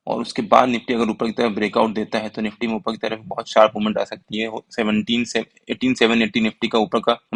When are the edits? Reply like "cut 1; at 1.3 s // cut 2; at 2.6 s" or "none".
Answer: none